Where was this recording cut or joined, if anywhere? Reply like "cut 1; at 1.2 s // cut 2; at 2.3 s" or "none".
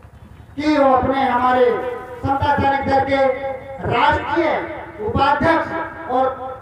none